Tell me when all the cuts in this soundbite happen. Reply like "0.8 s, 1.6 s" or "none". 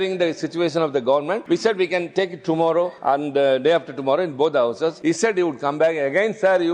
1.4 s, 2.9 s, 5.0 s